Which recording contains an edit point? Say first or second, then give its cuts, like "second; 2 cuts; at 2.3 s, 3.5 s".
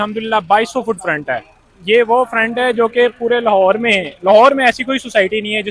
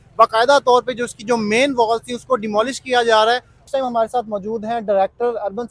second; 1 cut; at 3.6 s